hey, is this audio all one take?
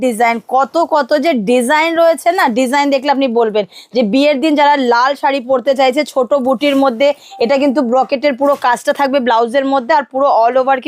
yes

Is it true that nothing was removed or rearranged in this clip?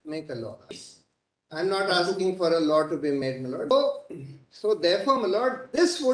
no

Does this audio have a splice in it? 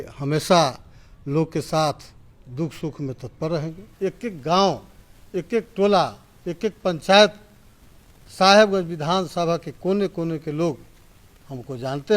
yes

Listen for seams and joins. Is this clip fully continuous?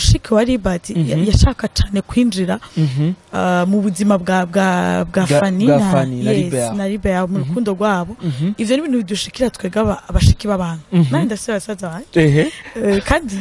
yes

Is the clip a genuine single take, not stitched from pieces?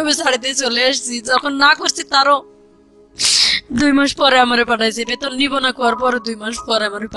yes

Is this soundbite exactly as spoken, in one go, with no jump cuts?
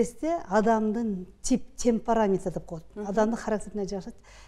yes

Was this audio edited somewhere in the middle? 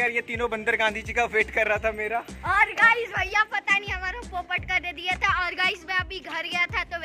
no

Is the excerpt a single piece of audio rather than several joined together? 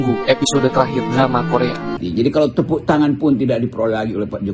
no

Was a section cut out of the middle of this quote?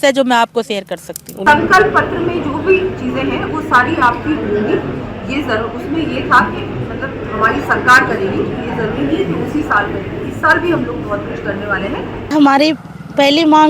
yes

